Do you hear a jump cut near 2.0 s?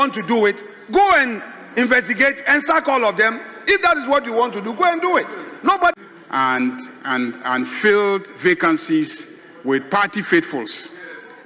no; 1 cut; at 5.9 s

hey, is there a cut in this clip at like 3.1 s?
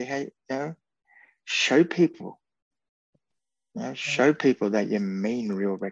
yes; 1 cut; at 3.1 s

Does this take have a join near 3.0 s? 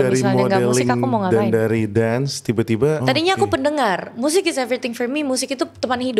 yes; 1 cut; at 3.0 s

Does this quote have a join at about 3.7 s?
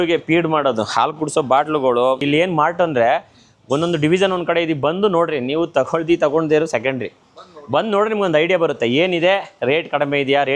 no; 1 cut; at 2.2 s

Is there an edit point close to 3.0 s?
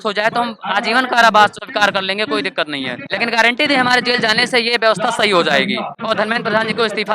yes; 3 cuts; at 1.6 s, 3.0 s, 6.0 s

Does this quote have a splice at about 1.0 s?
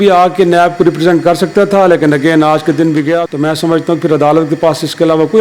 no; 1 cut; at 3.3 s

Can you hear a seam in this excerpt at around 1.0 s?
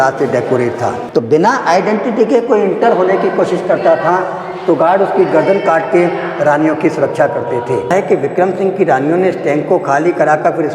yes; 2 cuts; at 1.0 s, 7.9 s

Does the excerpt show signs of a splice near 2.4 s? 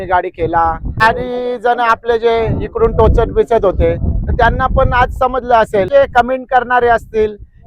no; 2 cuts; at 1.0 s, 5.9 s

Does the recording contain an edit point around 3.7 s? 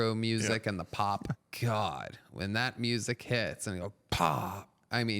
no; 1 cut; at 1.4 s

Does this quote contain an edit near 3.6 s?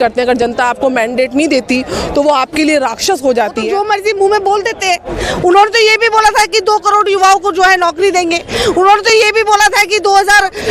yes; 1 cut; at 3.6 s

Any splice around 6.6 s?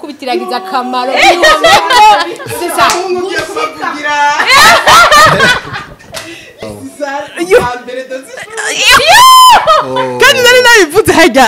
yes; 1 cut; at 6.6 s

